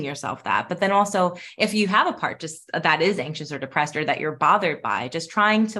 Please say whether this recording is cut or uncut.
uncut